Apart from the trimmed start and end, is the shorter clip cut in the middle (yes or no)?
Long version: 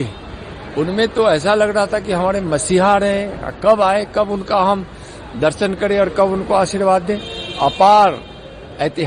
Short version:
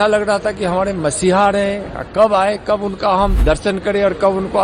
yes